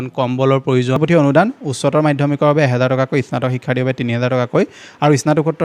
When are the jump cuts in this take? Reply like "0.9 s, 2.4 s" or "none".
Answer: 1.0 s